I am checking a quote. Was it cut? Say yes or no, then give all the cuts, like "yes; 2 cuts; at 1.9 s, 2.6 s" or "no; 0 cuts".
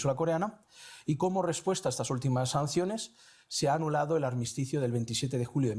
yes; 1 cut; at 1.3 s